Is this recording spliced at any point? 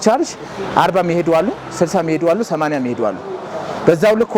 no; 0 cuts

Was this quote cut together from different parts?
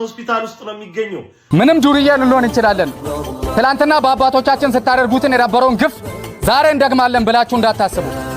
yes; 1 cut; at 1.5 s

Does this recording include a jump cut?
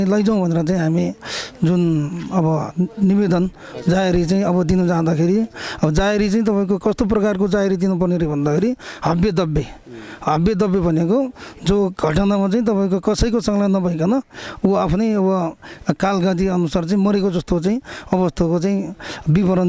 no; 0 cuts

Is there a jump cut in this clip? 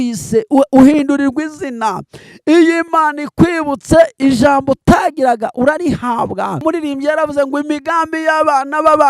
yes; 1 cut; at 6.6 s

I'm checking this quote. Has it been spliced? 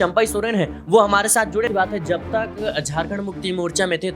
yes; 1 cut; at 1.7 s

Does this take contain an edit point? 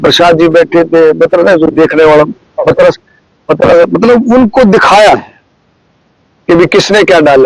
no; 0 cuts

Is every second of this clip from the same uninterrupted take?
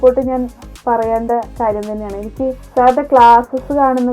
no; 1 cut; at 2.6 s

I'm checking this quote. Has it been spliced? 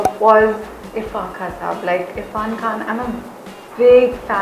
no; 0 cuts

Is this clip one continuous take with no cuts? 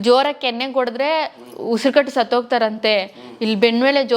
yes; 0 cuts

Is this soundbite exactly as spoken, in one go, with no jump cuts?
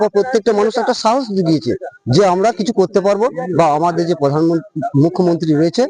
yes; 0 cuts

